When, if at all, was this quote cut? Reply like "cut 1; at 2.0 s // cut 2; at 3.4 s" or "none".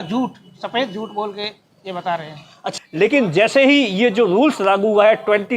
cut 1; at 2.6 s